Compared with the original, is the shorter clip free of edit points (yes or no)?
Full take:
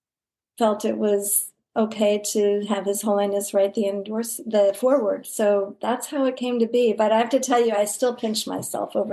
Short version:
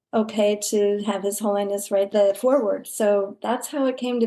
no